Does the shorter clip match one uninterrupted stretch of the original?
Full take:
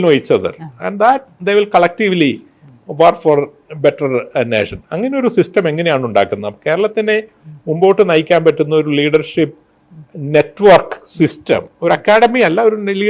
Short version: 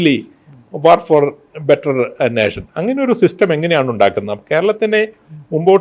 yes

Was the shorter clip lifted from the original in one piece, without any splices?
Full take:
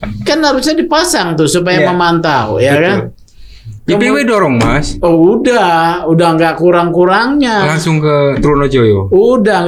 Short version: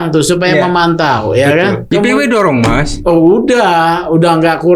no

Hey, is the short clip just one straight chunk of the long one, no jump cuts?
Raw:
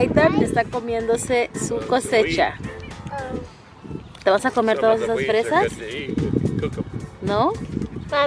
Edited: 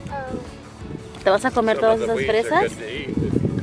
yes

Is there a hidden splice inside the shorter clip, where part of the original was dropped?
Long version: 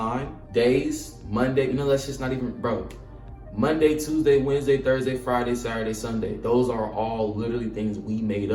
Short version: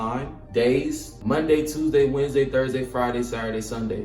yes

